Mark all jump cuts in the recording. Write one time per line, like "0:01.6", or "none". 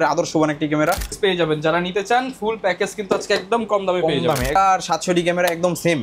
0:01.2
0:04.6